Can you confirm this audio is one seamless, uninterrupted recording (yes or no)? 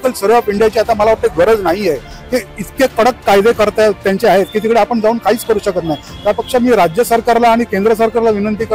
yes